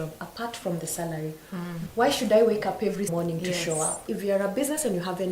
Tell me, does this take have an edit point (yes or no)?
no